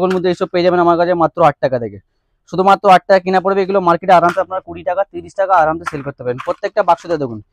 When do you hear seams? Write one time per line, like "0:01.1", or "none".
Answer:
none